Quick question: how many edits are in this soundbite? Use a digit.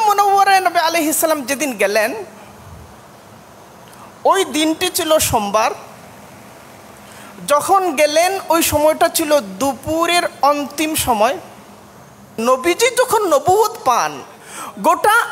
1